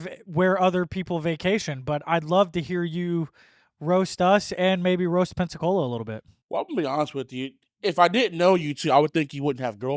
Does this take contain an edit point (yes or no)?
no